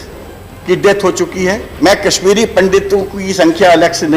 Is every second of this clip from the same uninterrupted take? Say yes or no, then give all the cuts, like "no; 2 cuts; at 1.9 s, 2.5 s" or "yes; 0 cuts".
no; 1 cut; at 1.7 s